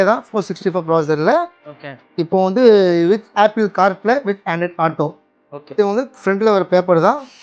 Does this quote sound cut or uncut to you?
cut